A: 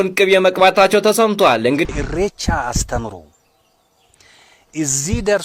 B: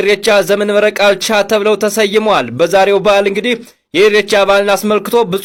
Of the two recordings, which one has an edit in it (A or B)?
A